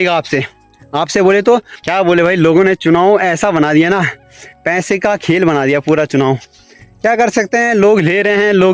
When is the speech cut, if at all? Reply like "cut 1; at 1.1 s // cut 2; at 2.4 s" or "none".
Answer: cut 1; at 1.7 s